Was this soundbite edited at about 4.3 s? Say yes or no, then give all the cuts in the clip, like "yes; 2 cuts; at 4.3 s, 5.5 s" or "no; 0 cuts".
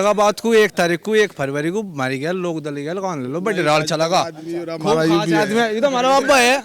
no; 0 cuts